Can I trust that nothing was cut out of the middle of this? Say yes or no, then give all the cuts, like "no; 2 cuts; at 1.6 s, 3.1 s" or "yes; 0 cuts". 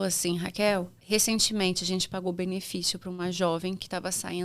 no; 1 cut; at 1.0 s